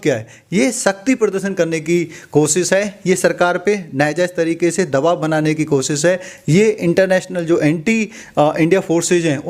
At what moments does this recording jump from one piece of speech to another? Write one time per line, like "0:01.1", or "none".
none